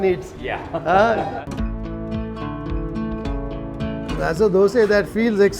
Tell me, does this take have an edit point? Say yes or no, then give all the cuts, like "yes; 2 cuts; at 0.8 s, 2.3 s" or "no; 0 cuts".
yes; 2 cuts; at 1.4 s, 4.2 s